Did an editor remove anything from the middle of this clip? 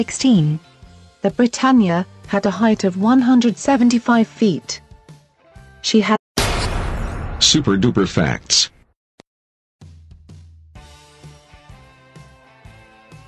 no; 0 cuts

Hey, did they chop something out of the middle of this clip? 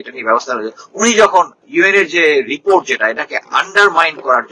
yes; 1 cut; at 1.6 s

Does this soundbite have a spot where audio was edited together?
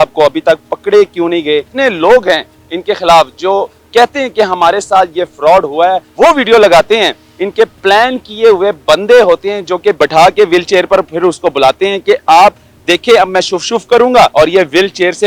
yes; 5 cuts; at 1.7 s, 6.1 s, 7.3 s, 10.0 s, 14.3 s

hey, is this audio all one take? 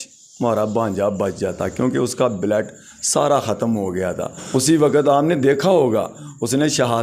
no; 1 cut; at 4.3 s

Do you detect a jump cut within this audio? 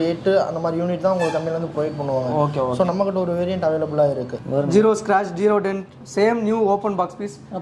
yes; 1 cut; at 4.3 s

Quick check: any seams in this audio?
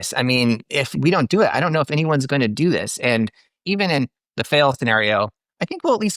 yes; 1 cut; at 3.5 s

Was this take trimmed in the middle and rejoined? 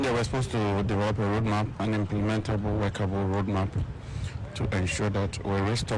yes; 1 cut; at 1.7 s

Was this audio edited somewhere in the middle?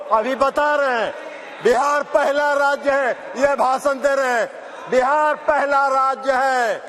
no; 0 cuts

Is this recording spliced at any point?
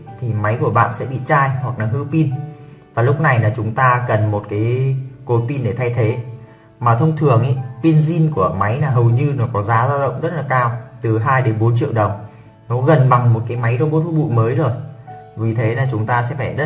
no; 0 cuts

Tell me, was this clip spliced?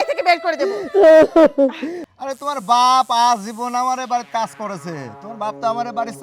yes; 1 cut; at 1.9 s

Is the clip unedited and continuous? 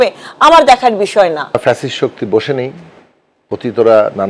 no; 1 cut; at 1.6 s

